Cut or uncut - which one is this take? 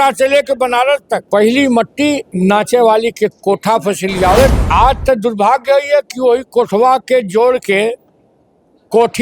cut